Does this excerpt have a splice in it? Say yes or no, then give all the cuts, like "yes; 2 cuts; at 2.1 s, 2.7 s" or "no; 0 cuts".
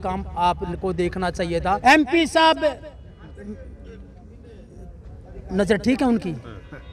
yes; 1 cut; at 1.8 s